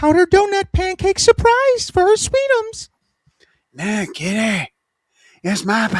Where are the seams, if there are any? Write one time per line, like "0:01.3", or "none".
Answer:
none